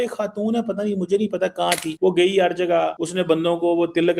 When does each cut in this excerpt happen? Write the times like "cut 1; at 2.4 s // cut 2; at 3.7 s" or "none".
cut 1; at 1.9 s // cut 2; at 3.0 s